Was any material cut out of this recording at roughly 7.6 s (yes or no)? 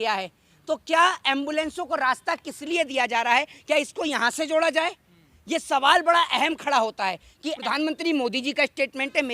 yes